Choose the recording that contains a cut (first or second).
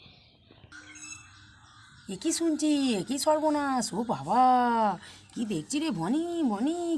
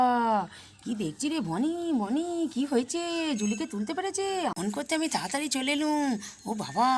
second